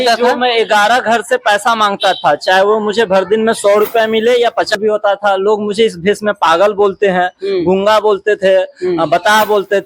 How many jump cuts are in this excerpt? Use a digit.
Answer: 1